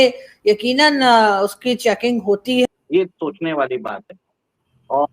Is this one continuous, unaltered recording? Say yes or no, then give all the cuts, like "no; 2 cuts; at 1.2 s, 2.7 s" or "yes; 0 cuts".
no; 1 cut; at 2.7 s